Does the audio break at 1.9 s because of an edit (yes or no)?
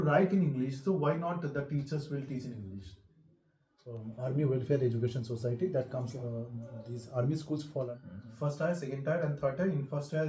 no